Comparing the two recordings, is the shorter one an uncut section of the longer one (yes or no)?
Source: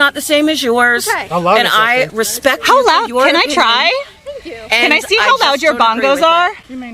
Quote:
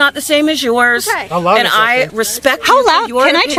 yes